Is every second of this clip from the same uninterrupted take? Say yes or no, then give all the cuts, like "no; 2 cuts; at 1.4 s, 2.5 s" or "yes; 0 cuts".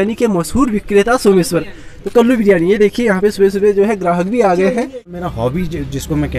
no; 1 cut; at 5.0 s